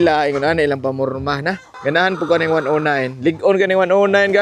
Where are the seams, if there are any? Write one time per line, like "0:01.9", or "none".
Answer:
0:01.7